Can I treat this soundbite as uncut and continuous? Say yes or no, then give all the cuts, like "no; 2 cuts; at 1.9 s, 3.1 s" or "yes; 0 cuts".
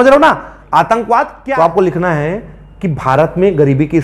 no; 1 cut; at 1.3 s